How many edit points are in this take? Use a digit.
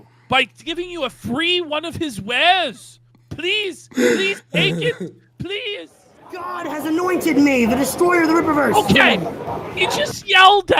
1